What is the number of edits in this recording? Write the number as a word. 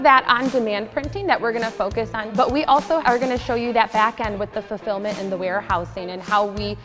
two